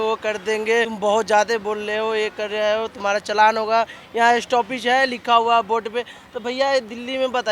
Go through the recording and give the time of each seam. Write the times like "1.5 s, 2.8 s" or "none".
0.9 s